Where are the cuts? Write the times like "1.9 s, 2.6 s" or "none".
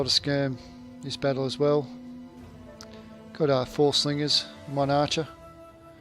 5.1 s